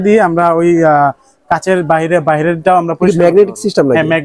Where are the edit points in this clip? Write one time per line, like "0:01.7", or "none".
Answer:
none